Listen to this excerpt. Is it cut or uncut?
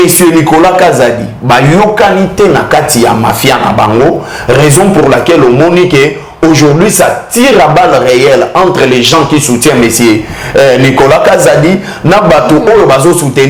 uncut